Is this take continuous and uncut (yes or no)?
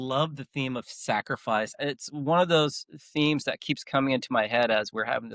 no